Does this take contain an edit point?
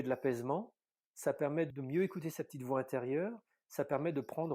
yes; 1 cut; at 1.7 s

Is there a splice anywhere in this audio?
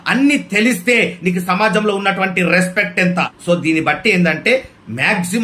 no; 0 cuts

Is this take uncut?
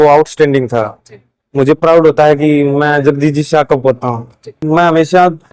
no; 1 cut; at 4.6 s

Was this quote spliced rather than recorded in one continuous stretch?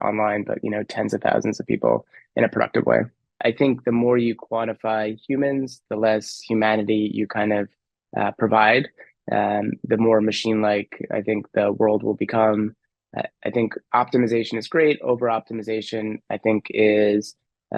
yes; 1 cut; at 3.3 s

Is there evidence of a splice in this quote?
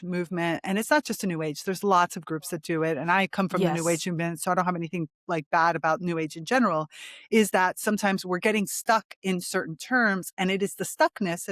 no; 0 cuts

